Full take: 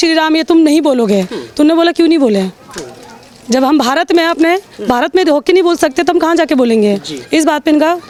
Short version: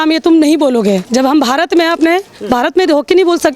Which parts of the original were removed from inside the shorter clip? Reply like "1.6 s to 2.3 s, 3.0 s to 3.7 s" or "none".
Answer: 1.3 s to 3.4 s